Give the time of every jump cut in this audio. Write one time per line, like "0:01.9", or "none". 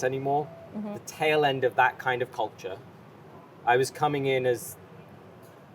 0:01.0